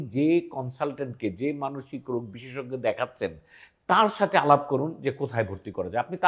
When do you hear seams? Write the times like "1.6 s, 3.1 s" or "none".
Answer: none